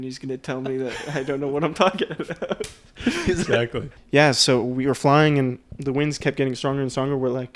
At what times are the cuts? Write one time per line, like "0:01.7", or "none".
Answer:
0:03.9